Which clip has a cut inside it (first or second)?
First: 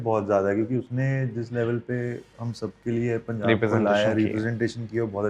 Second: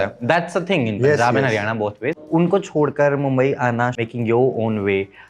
second